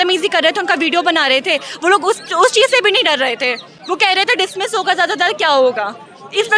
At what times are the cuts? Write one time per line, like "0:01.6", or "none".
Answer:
none